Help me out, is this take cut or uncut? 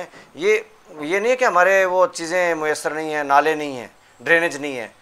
uncut